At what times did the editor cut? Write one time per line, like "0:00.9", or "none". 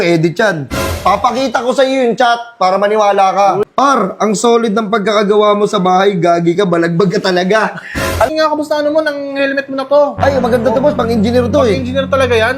0:03.6
0:08.3